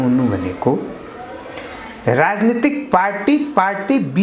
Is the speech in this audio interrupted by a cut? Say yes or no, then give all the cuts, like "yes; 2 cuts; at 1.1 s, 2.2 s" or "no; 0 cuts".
no; 0 cuts